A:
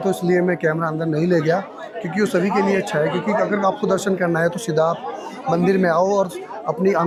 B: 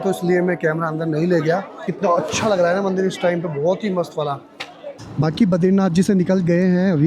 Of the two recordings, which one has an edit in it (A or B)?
B